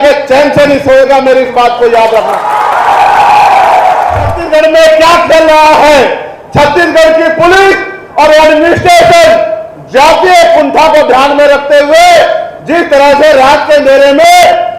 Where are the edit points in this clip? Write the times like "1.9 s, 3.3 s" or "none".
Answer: 4.4 s